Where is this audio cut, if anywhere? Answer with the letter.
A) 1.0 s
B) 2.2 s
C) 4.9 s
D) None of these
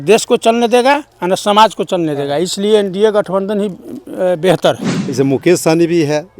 C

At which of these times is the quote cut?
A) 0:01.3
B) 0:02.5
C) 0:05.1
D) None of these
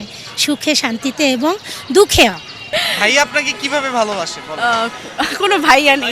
B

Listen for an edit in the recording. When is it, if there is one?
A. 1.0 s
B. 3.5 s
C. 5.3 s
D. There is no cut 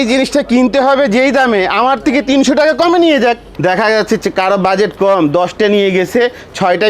B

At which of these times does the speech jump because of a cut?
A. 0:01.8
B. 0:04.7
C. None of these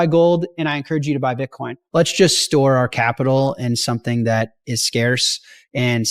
A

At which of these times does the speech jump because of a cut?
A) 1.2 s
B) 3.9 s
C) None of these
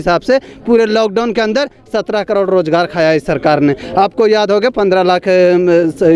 C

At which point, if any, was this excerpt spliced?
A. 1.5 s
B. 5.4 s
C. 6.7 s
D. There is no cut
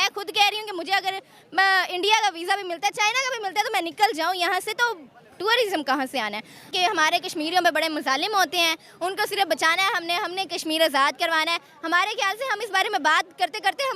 C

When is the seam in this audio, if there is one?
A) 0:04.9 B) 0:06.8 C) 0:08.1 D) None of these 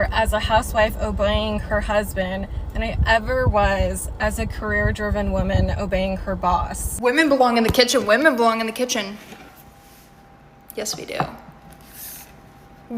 B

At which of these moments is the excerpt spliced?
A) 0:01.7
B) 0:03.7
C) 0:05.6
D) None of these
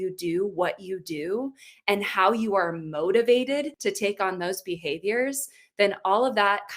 B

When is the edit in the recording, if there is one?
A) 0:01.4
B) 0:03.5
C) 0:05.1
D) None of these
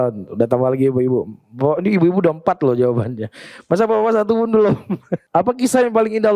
C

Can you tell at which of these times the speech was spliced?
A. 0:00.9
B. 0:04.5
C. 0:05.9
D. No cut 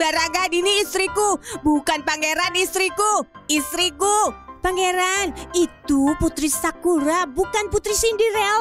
B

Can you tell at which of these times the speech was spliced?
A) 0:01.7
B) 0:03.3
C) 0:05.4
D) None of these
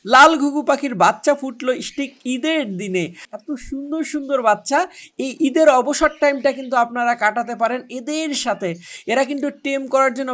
B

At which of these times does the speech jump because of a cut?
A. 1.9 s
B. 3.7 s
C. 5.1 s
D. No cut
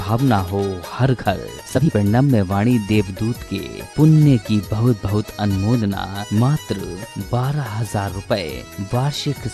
A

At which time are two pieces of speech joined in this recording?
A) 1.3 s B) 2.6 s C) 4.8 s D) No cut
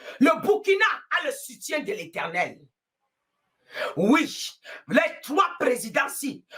D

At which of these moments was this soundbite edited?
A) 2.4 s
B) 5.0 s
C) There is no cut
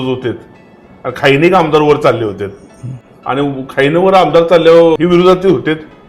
B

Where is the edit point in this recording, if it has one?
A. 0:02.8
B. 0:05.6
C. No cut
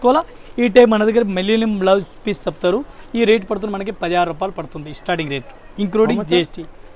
C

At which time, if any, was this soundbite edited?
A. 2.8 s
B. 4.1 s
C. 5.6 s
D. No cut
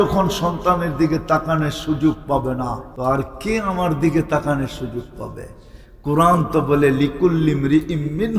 A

